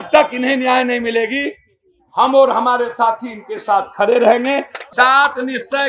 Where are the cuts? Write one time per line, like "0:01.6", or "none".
0:04.8